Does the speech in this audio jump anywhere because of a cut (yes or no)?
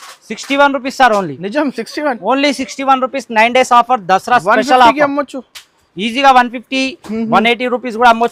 no